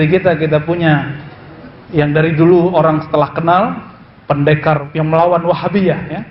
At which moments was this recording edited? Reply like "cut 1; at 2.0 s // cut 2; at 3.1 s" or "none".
cut 1; at 4.8 s